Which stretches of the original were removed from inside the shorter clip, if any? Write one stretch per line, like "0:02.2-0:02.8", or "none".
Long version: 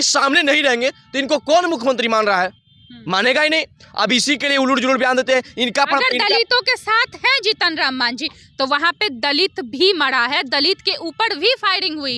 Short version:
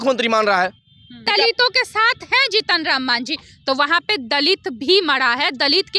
0:03.0-0:06.2